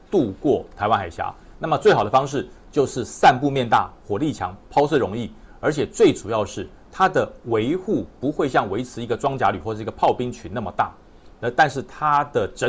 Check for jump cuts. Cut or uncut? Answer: uncut